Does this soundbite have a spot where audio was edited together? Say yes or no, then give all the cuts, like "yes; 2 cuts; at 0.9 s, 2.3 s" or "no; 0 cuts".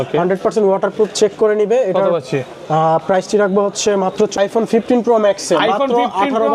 yes; 1 cut; at 4.5 s